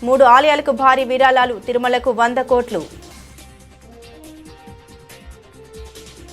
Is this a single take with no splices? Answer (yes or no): yes